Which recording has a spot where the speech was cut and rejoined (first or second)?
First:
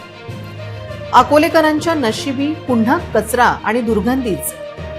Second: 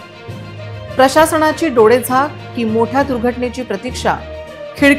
first